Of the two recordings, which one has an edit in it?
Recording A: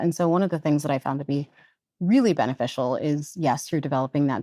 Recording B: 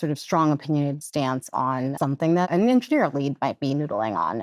B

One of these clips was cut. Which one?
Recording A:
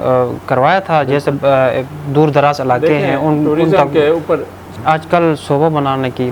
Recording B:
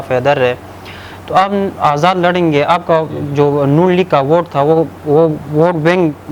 A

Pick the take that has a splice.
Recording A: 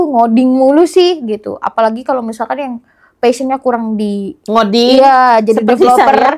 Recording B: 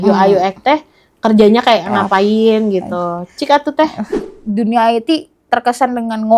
B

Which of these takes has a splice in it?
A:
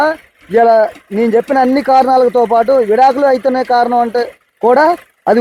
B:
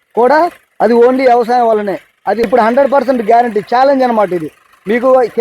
B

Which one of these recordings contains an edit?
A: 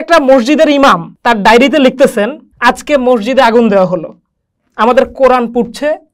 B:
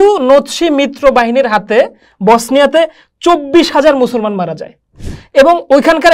A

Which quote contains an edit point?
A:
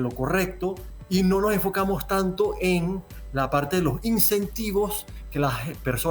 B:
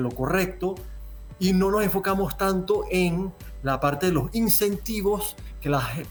A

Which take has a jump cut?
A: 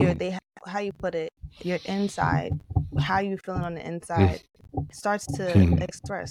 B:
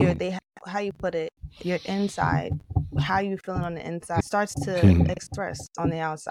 B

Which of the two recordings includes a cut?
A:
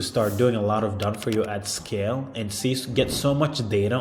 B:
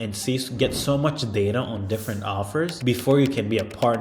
B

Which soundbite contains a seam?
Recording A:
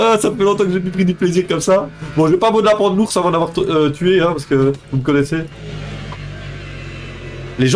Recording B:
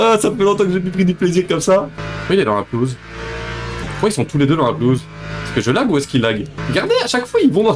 B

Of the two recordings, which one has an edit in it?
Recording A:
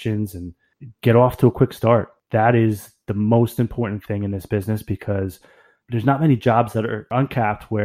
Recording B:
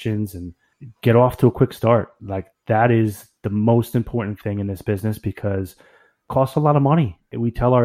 A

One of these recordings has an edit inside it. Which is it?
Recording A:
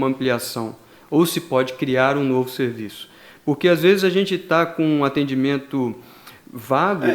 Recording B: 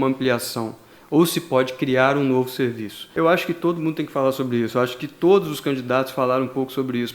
B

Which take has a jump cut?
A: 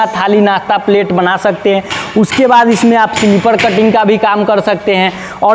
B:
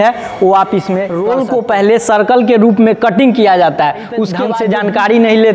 B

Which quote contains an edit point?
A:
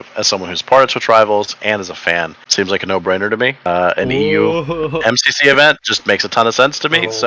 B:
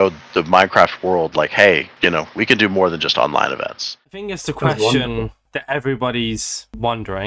B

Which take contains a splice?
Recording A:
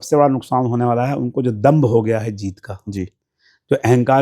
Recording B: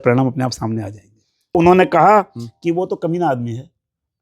B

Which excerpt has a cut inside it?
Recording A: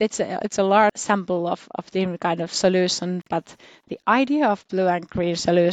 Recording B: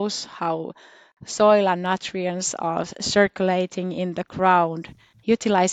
A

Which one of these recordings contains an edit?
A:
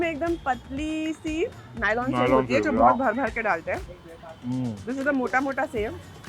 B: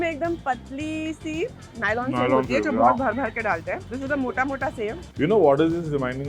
B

